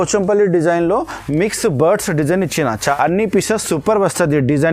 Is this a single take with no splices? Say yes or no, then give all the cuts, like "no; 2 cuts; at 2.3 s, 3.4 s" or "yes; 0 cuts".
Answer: no; 1 cut; at 2.8 s